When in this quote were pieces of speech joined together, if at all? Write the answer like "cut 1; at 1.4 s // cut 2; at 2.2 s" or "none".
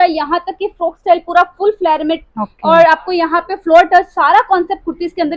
none